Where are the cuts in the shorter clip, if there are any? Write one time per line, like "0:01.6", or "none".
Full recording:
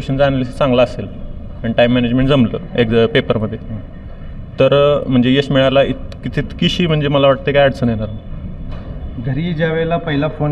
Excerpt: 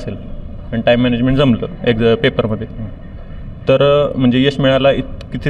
none